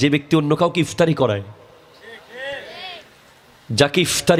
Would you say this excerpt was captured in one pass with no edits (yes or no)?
yes